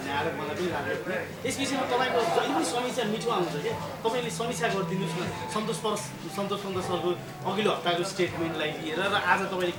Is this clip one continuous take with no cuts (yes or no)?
yes